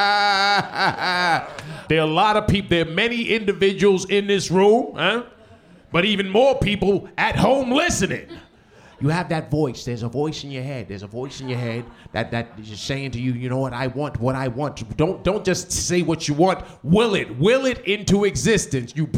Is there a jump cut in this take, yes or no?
yes